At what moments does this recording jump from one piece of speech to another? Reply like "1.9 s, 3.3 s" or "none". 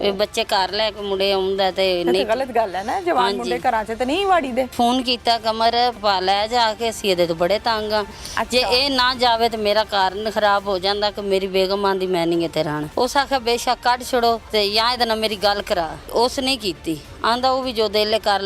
4.7 s, 6.0 s, 12.8 s, 14.4 s, 16.1 s